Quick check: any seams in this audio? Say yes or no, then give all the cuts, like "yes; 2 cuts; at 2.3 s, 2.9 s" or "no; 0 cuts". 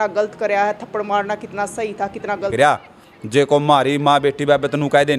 yes; 1 cut; at 2.5 s